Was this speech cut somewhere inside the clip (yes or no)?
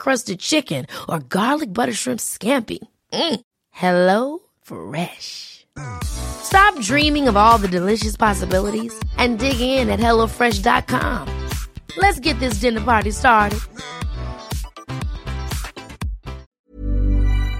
yes